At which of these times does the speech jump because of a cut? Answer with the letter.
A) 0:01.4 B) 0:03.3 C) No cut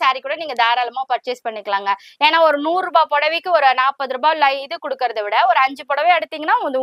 C